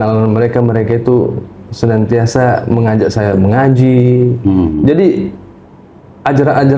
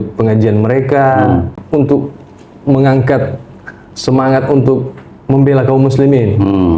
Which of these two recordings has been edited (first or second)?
second